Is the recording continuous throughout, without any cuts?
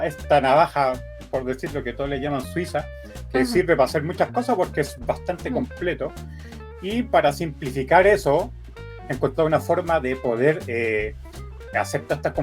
no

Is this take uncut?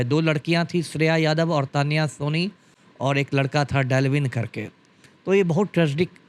yes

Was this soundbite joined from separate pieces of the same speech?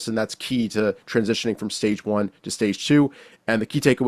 no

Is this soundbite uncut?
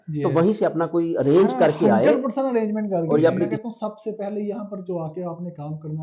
no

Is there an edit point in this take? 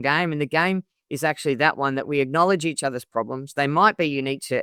no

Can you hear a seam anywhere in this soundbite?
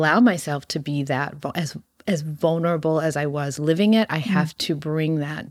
no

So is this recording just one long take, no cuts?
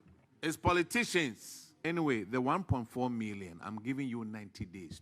no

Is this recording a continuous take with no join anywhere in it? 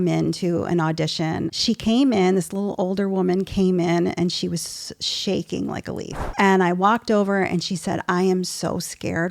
no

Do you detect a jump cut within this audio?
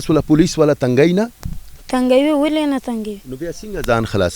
no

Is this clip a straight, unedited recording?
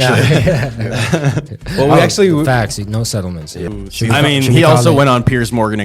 no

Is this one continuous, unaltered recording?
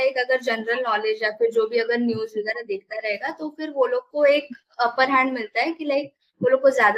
yes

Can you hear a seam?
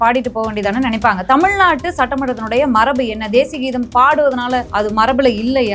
yes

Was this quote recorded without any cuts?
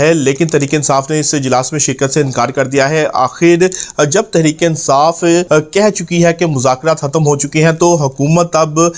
no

